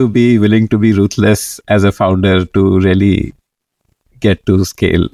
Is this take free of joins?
yes; 0 cuts

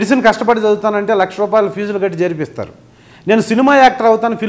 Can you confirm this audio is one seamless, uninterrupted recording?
yes; 0 cuts

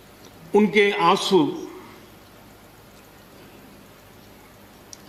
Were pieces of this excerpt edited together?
no; 0 cuts

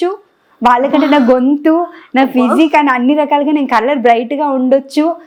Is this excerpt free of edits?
yes; 0 cuts

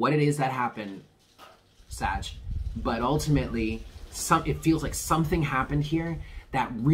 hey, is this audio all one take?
yes; 0 cuts

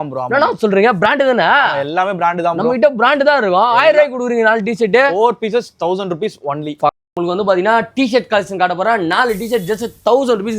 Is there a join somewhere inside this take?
yes; 1 cut; at 7.0 s

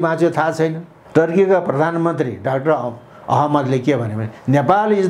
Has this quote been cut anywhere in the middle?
yes; 1 cut; at 0.9 s

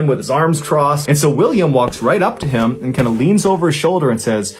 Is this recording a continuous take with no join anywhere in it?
no; 1 cut; at 1.0 s

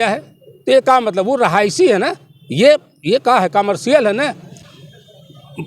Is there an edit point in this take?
no; 0 cuts

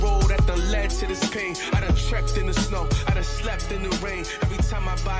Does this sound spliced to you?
no; 0 cuts

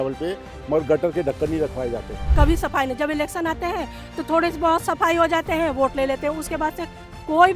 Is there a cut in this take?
yes; 1 cut; at 2.2 s

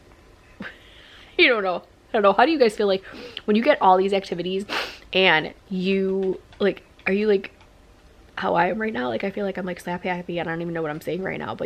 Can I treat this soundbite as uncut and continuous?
yes; 0 cuts

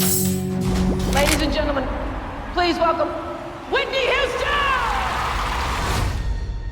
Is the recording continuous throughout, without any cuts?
no; 1 cut; at 1.1 s

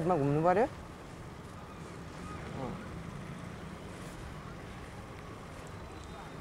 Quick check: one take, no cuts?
yes; 0 cuts

